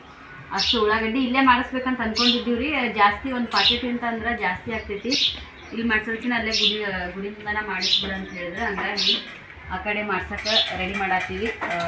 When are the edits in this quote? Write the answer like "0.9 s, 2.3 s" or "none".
none